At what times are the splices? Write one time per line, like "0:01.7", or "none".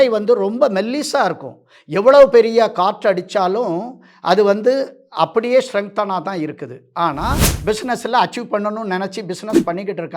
0:07.5